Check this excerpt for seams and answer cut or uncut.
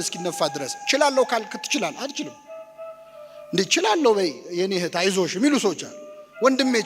uncut